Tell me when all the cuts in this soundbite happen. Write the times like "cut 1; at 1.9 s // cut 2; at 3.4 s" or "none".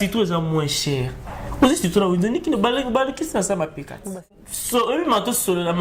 cut 1; at 4.0 s